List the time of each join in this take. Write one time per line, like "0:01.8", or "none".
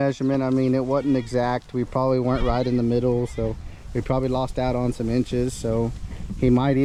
none

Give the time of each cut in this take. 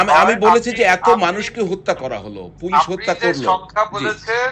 none

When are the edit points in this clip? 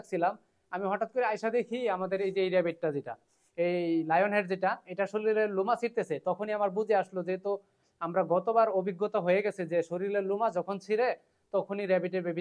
none

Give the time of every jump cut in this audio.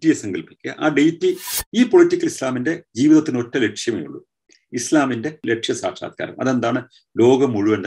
0:01.6

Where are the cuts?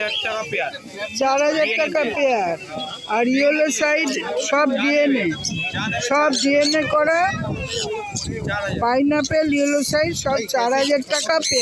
none

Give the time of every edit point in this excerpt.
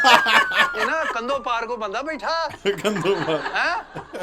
none

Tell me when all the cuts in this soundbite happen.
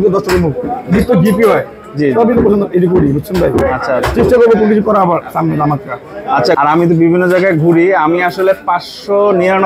0:06.6

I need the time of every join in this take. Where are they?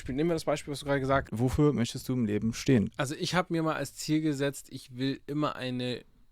0:01.3
0:02.9

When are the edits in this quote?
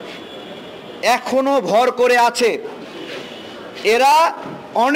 none

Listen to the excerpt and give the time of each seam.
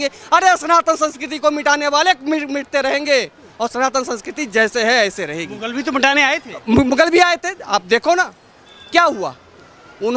none

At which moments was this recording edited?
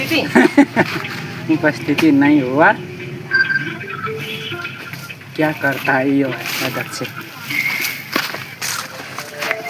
none

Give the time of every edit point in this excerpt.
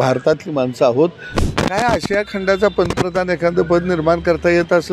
0:01.4

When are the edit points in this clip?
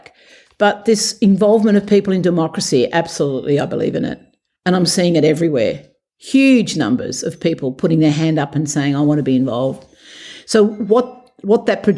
none

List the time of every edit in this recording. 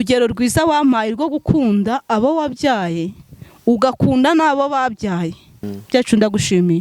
0:05.7

